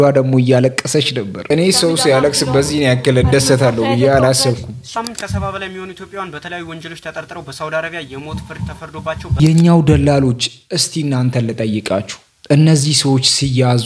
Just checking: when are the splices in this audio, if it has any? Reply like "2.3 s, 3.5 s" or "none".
4.9 s, 9.4 s